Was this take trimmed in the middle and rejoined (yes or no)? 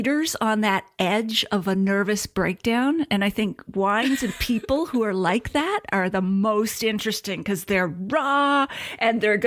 no